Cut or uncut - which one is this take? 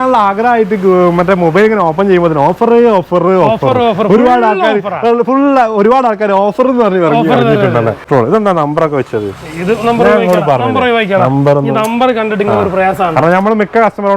cut